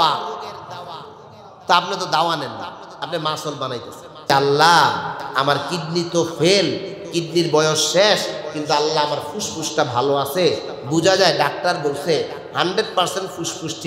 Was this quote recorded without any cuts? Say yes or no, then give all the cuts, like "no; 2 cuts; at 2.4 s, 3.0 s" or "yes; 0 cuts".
no; 1 cut; at 4.3 s